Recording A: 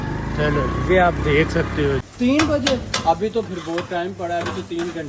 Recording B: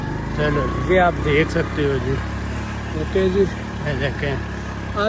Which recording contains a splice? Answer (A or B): A